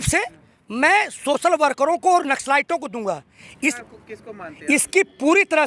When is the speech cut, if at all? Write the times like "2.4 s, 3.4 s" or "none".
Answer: 3.7 s